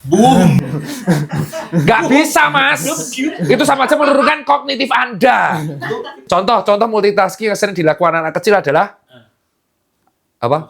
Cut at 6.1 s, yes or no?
yes